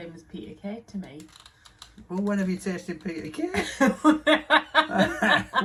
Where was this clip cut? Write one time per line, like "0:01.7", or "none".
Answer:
none